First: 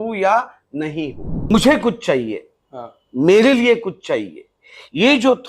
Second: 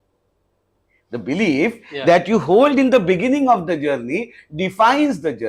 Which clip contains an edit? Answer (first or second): first